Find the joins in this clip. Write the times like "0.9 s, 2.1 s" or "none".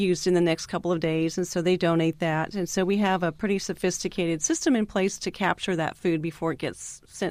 none